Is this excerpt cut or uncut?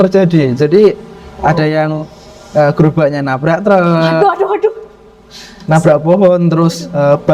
uncut